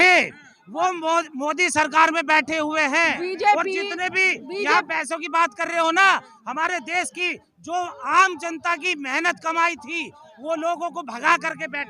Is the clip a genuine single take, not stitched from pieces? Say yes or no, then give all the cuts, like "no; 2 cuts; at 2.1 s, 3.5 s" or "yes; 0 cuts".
yes; 0 cuts